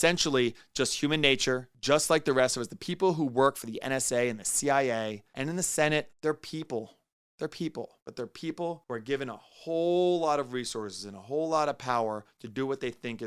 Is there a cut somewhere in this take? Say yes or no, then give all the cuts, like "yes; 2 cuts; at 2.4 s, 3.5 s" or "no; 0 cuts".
no; 0 cuts